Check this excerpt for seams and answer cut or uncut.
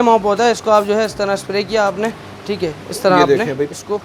uncut